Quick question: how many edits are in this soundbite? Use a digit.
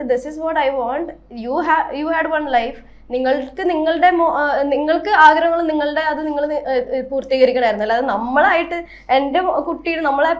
0